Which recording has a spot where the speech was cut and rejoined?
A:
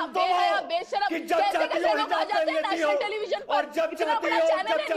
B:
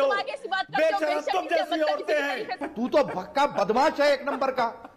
B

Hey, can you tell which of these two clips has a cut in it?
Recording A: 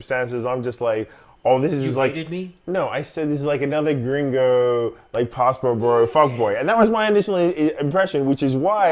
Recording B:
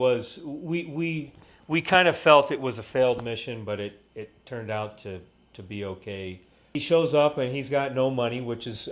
B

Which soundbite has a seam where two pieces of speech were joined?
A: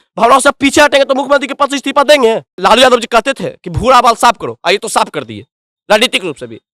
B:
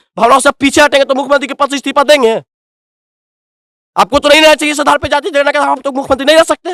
A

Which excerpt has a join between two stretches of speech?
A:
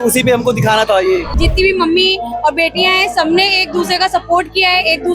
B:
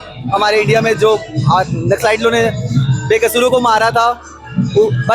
A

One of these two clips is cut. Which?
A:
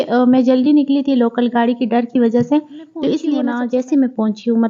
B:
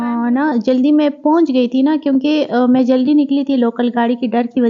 A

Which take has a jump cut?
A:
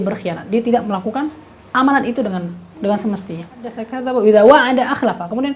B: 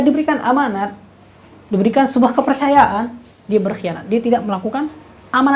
A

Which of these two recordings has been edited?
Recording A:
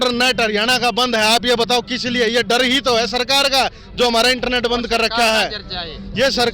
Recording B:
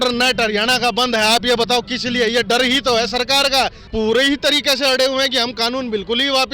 B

